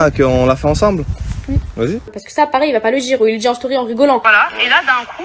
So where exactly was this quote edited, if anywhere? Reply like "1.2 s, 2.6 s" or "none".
2.2 s, 4.2 s